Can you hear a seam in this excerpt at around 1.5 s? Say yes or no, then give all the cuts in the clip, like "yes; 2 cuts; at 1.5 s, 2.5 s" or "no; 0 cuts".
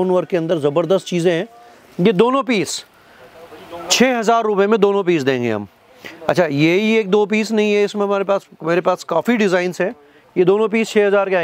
no; 0 cuts